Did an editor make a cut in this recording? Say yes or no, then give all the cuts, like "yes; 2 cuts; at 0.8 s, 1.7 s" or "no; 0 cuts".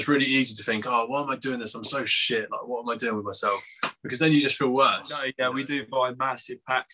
yes; 1 cut; at 5.3 s